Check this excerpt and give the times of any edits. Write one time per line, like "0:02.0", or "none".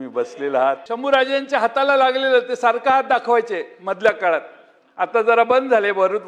0:00.9